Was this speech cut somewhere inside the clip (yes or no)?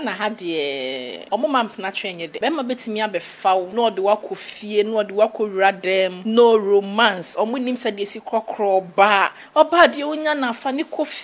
yes